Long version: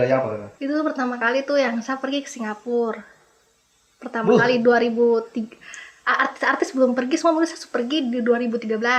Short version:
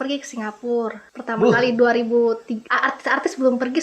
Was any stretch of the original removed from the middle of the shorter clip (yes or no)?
yes